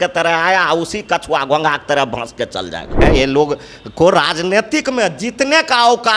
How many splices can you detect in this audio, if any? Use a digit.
1